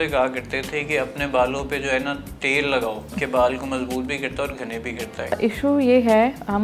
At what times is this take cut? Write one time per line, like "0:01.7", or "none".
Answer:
0:03.1
0:05.4